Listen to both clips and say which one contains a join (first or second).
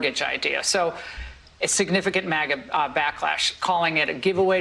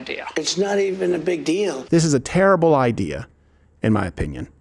second